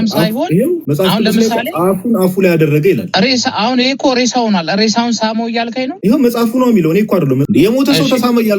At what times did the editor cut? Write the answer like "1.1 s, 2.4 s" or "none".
0.9 s, 3.1 s, 5.9 s, 7.4 s